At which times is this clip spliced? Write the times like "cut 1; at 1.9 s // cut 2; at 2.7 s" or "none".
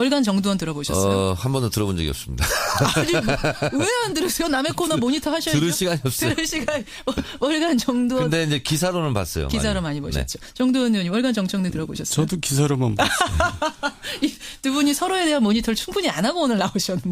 cut 1; at 11.2 s